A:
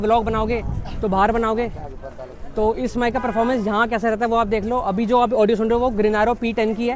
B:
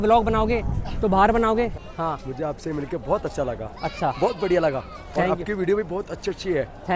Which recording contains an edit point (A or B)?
B